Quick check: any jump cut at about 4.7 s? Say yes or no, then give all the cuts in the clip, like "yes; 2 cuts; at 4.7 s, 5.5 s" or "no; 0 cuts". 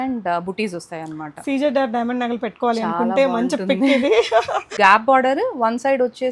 yes; 1 cut; at 4.7 s